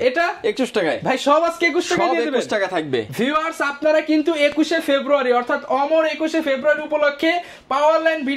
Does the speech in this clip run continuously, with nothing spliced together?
yes; 0 cuts

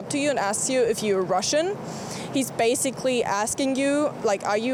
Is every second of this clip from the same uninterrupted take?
yes; 0 cuts

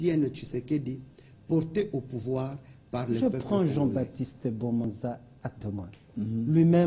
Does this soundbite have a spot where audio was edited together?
yes; 1 cut; at 3.2 s

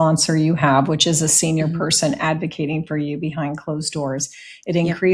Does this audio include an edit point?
no; 0 cuts

